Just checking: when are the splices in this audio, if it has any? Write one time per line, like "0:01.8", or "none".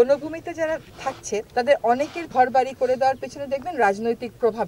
0:01.3
0:02.2

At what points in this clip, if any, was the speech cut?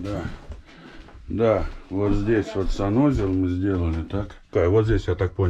0:04.5

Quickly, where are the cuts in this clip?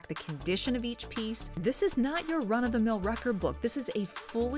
0:01.6

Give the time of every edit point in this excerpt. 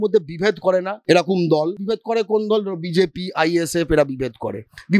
0:00.9
0:01.8

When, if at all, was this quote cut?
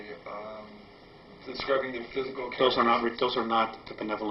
0:02.9

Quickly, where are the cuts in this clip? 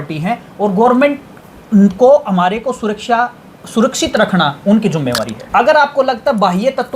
0:05.4

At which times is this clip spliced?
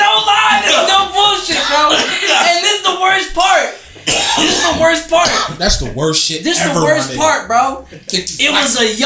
none

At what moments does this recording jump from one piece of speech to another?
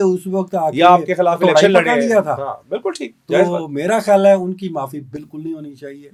none

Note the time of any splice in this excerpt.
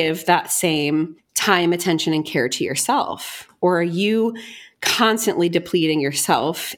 0:01.2

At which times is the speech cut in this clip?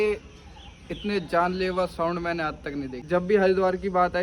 0:02.9

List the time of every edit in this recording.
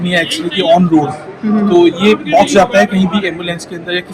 none

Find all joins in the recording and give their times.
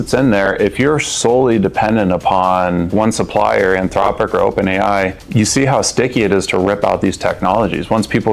0:02.9
0:05.2

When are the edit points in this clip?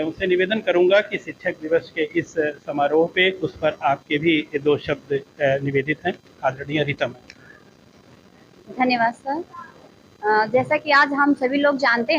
0:03.5

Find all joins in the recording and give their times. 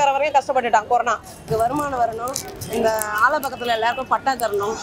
0:01.4

